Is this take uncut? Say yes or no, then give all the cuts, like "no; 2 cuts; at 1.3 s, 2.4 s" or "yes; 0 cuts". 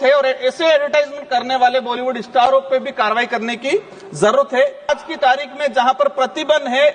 no; 1 cut; at 4.9 s